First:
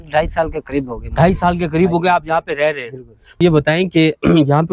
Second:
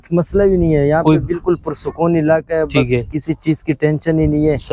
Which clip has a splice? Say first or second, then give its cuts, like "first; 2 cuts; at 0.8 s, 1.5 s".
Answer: first; 1 cut; at 3.4 s